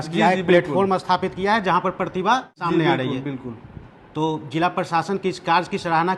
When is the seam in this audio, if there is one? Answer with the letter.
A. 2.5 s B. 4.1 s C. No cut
C